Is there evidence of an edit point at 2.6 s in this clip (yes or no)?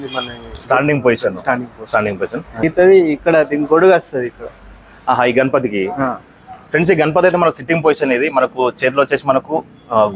yes